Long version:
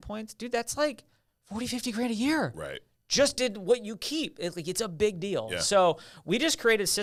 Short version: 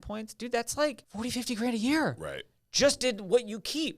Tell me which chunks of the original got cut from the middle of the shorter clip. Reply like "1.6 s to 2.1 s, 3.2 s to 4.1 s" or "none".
1.1 s to 1.4 s